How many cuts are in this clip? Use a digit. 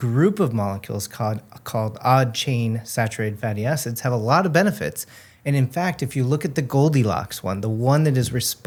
0